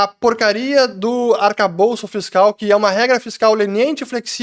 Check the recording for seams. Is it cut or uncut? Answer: uncut